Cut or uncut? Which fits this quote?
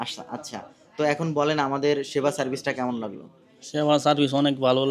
uncut